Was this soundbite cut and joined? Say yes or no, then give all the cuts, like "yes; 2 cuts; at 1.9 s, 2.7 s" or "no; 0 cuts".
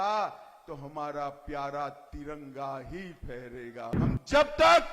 yes; 1 cut; at 4.0 s